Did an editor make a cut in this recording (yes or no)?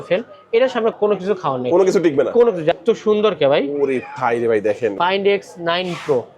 yes